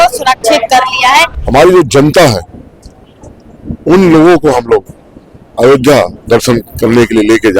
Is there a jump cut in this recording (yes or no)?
yes